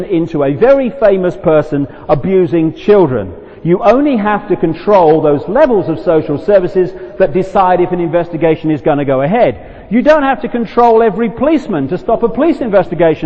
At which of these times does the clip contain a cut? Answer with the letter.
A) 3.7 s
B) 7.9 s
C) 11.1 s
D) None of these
C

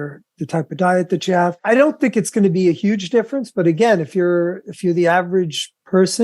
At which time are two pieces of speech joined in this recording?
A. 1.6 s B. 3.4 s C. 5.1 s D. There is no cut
A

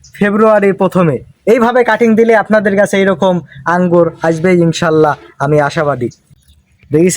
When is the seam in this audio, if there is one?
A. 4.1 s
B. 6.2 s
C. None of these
B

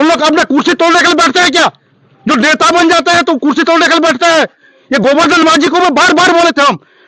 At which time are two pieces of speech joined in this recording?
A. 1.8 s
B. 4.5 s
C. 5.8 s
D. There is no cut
D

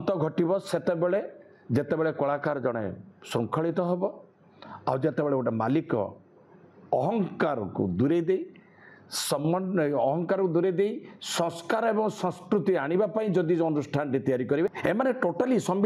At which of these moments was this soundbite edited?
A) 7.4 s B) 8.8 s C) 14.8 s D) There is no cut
C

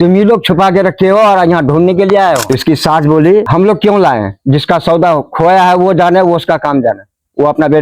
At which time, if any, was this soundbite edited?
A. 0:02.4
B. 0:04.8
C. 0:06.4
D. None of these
A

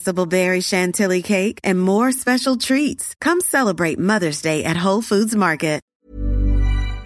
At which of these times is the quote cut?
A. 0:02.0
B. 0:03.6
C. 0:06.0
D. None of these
C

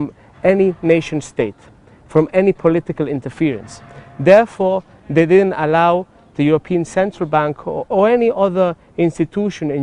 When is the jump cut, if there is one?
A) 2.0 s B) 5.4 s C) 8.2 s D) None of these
C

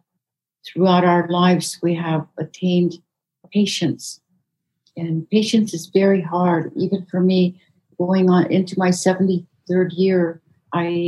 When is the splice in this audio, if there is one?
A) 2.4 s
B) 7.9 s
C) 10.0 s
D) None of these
B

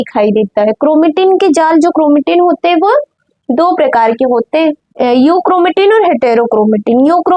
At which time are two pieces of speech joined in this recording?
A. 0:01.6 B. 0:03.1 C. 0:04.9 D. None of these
C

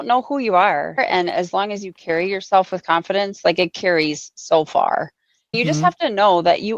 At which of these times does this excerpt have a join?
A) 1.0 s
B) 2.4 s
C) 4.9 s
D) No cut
A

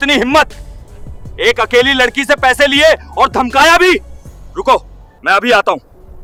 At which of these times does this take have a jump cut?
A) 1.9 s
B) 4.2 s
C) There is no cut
C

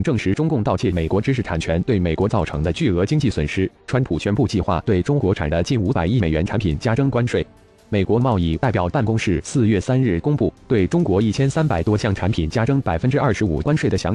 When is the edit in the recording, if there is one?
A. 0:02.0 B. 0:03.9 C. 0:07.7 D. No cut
B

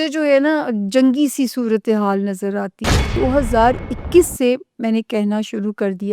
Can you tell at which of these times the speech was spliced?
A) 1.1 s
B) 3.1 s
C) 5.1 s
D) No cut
B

